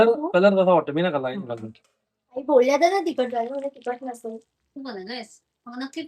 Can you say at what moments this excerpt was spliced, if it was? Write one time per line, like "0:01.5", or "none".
0:04.7